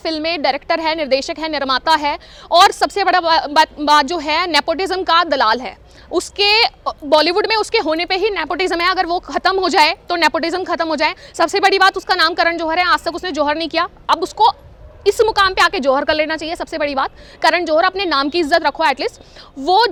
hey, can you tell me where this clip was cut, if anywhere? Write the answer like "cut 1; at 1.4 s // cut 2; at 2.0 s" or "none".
none

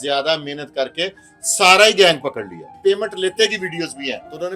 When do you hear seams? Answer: cut 1; at 2.8 s

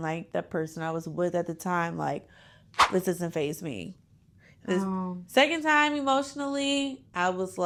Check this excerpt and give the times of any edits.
none

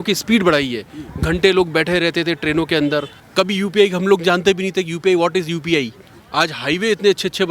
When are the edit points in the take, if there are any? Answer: cut 1; at 3.2 s // cut 2; at 6.1 s

